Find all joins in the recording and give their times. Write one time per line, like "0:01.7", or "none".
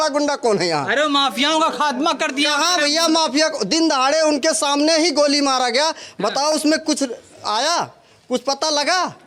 none